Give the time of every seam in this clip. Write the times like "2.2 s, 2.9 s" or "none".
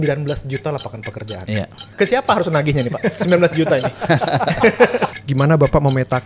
1.9 s, 5.1 s